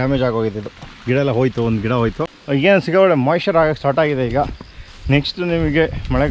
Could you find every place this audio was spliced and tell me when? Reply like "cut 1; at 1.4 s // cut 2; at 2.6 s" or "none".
cut 1; at 2.3 s

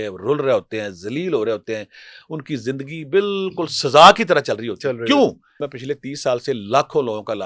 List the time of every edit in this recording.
cut 1; at 5.7 s

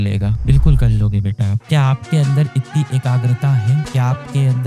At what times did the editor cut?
cut 1; at 1.6 s

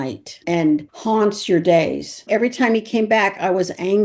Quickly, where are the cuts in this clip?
cut 1; at 2.2 s

